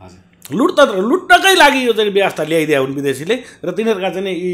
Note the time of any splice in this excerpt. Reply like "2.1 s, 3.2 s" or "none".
none